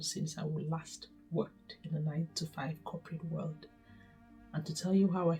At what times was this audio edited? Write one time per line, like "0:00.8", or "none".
none